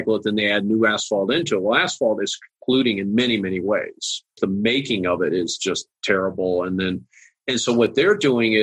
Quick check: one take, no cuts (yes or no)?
no